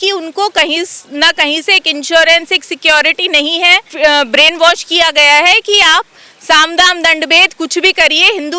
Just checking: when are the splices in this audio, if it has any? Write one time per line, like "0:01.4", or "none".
0:03.9